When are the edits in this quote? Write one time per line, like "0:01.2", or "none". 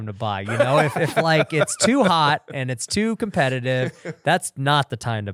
none

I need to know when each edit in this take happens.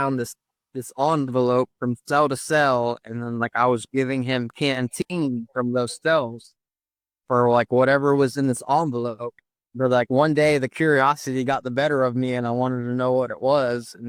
none

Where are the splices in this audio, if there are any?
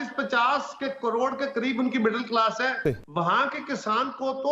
0:03.0

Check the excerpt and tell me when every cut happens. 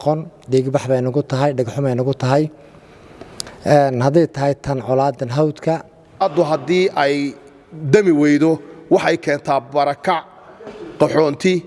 0:06.2

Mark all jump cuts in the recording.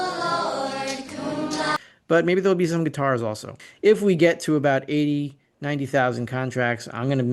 0:03.6

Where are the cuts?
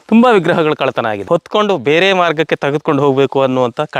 0:01.2

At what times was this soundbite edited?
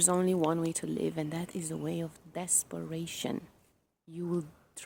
none

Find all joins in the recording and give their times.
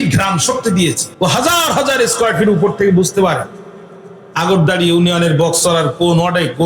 0:01.0

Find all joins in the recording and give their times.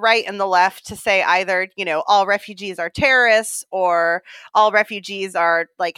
none

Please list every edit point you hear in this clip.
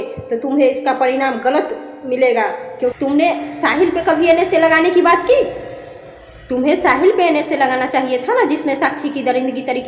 0:03.0

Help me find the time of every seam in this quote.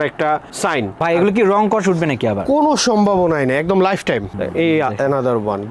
0:01.0
0:04.3

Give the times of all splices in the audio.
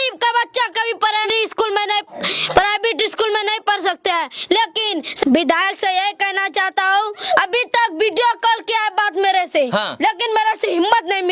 0:01.3
0:05.2

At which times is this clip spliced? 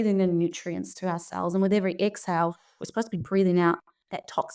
none

